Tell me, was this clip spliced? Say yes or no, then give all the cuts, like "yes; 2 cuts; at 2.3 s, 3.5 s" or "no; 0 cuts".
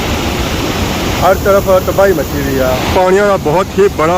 yes; 1 cut; at 1.2 s